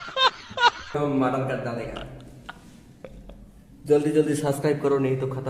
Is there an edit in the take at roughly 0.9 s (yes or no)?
yes